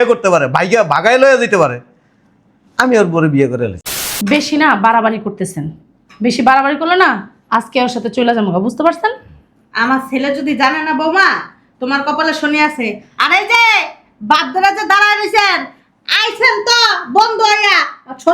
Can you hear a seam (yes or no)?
yes